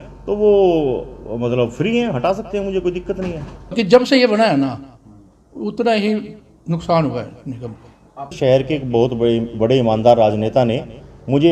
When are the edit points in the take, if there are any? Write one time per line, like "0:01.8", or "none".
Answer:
0:03.7
0:08.4